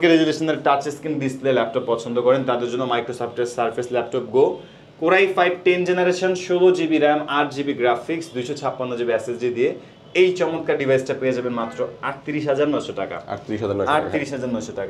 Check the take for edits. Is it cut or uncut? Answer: uncut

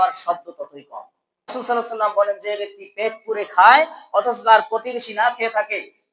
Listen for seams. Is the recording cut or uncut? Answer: cut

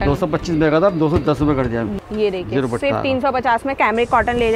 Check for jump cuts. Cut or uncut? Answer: cut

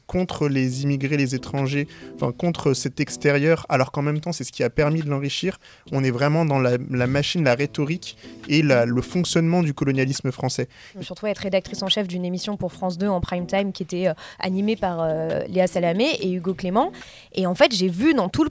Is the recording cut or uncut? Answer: cut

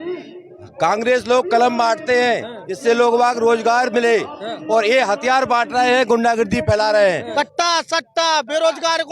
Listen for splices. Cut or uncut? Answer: cut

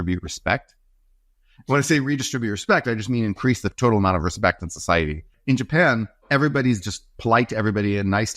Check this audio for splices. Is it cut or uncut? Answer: cut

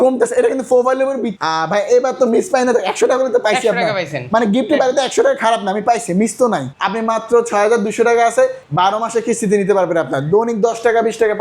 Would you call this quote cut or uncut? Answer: cut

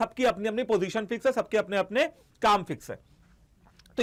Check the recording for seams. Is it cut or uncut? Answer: uncut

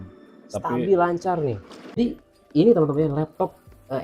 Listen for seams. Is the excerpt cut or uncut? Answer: cut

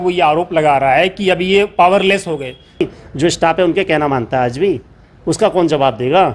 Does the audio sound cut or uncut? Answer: cut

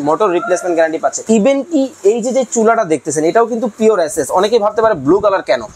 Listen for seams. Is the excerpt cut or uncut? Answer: cut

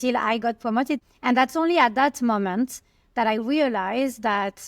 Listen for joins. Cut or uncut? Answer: cut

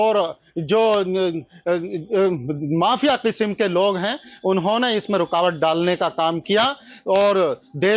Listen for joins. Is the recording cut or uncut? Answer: uncut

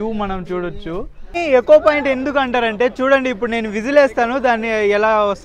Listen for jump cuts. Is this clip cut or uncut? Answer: cut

